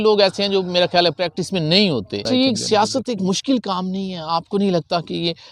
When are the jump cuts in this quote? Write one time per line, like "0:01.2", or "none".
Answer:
0:02.3